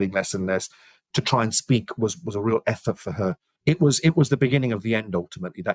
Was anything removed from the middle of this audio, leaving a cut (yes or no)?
yes